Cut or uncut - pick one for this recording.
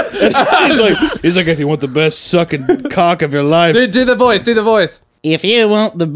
cut